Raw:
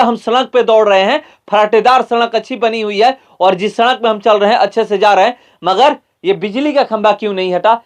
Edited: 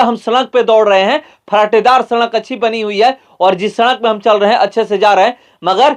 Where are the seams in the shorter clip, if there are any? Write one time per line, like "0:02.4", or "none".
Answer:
none